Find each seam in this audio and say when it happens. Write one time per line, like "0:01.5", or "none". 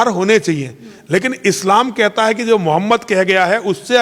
none